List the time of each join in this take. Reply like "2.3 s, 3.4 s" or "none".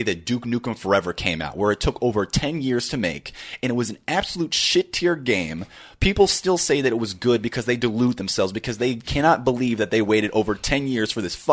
none